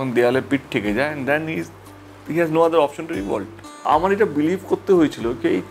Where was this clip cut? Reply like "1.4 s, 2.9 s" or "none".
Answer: 3.8 s